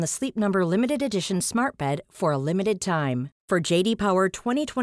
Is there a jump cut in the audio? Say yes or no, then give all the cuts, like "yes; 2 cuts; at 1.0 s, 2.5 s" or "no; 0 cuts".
no; 0 cuts